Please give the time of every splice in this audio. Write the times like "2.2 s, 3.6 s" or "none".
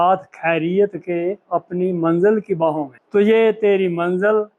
2.9 s